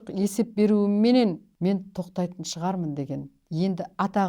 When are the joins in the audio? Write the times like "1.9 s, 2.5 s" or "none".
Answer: 1.5 s, 3.4 s